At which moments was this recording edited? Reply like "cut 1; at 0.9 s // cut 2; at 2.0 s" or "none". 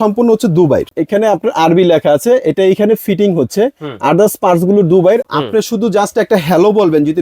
cut 1; at 0.9 s // cut 2; at 5.3 s